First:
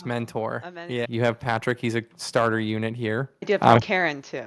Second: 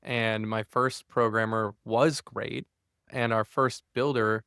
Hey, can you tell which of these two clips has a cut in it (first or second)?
first